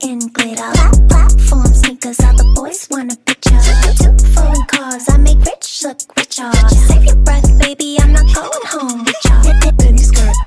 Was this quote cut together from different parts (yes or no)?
no